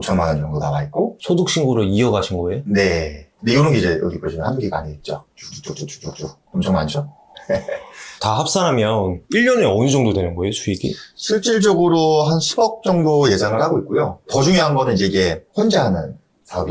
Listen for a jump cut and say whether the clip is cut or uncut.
cut